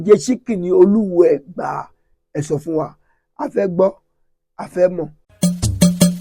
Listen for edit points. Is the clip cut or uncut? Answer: cut